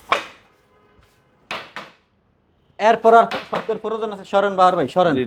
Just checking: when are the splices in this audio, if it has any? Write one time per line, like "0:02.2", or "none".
none